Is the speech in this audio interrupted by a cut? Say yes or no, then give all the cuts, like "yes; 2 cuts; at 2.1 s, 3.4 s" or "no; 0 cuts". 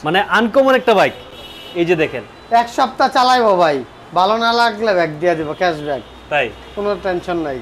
no; 0 cuts